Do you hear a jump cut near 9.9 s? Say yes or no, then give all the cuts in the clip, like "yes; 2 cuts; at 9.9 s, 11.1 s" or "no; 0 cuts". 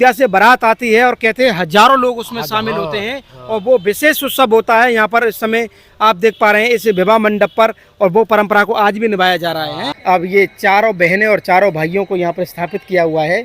yes; 1 cut; at 9.9 s